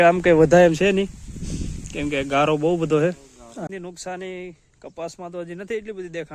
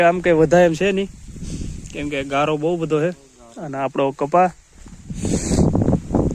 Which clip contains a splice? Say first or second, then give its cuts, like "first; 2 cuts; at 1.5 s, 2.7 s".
first; 1 cut; at 3.7 s